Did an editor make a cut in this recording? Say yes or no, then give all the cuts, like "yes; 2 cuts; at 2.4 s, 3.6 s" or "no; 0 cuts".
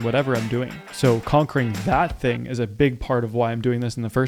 no; 0 cuts